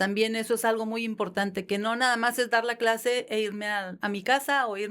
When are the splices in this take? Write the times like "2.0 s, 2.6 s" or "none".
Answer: 3.9 s